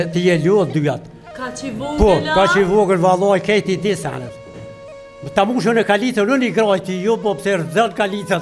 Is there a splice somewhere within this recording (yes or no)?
no